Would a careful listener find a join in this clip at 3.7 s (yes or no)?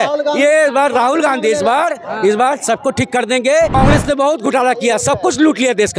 yes